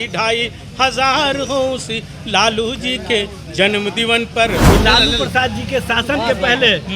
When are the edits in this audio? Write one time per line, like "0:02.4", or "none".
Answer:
0:04.7